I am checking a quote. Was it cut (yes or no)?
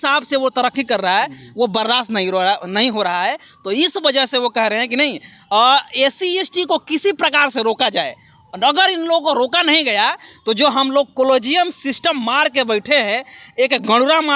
no